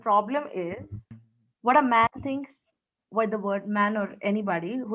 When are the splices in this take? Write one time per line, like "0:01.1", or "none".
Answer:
0:01.0